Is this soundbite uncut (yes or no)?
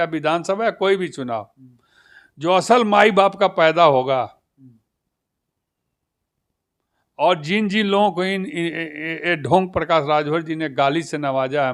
yes